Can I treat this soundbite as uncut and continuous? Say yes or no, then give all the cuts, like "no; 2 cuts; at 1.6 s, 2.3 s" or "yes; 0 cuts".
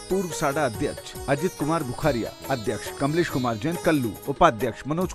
no; 2 cuts; at 2.9 s, 4.2 s